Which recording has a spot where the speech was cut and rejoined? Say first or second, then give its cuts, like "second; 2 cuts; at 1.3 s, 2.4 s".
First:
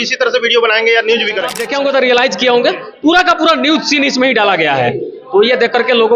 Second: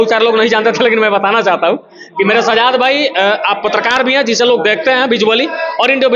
first; 1 cut; at 1.6 s